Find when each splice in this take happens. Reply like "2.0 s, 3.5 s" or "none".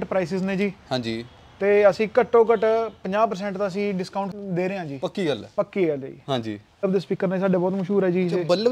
4.4 s, 6.8 s